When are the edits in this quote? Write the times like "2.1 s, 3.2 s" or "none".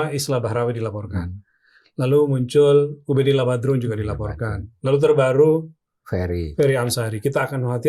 none